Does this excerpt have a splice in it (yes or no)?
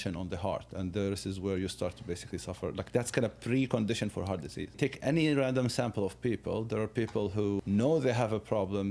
yes